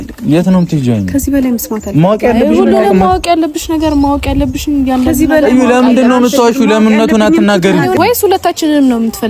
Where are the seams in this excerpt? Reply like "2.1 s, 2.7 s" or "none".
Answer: 8.0 s